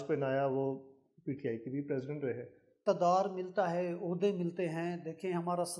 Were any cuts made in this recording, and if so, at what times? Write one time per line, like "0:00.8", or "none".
0:02.7